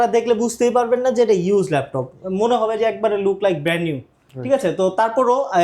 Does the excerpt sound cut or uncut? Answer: uncut